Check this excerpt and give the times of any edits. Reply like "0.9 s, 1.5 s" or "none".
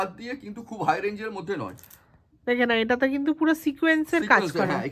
none